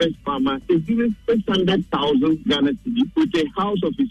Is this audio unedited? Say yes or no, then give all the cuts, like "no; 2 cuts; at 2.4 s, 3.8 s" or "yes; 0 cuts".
no; 1 cut; at 3.1 s